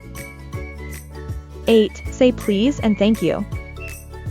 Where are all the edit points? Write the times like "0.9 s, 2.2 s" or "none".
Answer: 1.3 s, 3.5 s